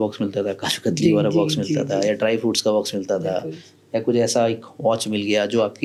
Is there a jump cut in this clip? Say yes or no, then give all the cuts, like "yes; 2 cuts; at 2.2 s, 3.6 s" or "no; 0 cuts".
no; 0 cuts